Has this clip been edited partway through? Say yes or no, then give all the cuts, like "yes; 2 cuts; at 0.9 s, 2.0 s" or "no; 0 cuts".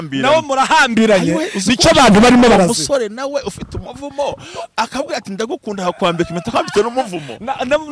no; 0 cuts